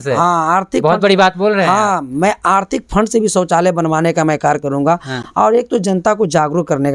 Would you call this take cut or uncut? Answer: uncut